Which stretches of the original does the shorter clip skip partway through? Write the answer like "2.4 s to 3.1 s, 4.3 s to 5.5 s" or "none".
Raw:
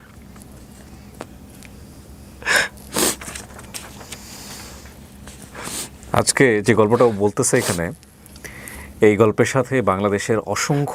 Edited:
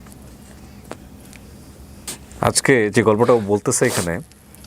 2.4 s to 5.8 s